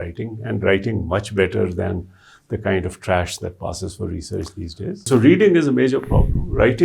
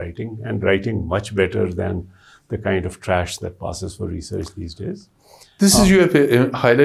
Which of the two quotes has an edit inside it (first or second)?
first